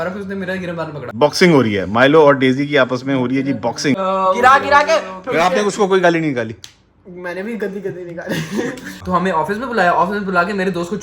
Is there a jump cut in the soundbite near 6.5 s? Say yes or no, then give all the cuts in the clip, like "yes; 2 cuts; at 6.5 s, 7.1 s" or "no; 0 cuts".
no; 3 cuts; at 1.0 s, 4.0 s, 9.0 s